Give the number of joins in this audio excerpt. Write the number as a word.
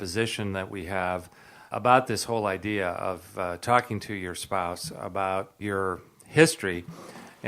two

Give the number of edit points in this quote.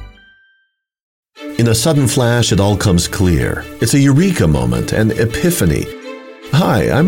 one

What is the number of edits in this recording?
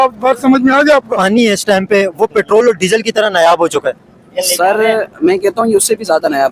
one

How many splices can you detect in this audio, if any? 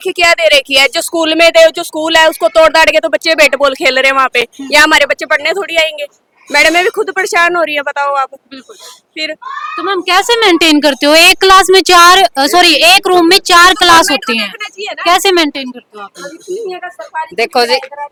zero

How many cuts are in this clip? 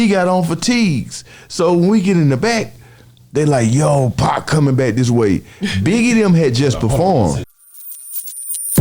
one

